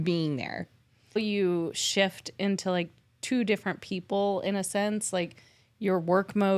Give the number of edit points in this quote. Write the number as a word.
one